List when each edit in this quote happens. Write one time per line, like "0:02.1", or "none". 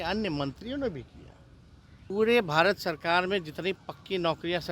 0:02.1